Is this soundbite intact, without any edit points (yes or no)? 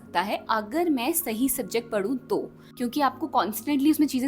no